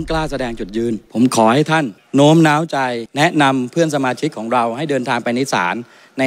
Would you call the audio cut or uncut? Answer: cut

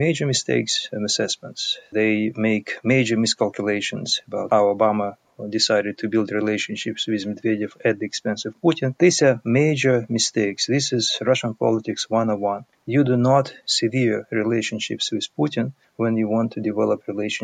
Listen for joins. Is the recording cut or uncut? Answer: cut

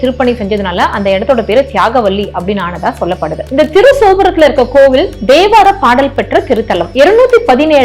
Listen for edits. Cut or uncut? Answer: uncut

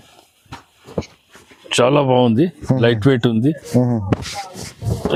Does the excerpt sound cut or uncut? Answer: uncut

